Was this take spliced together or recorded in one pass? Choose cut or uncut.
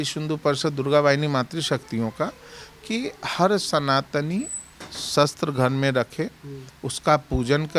uncut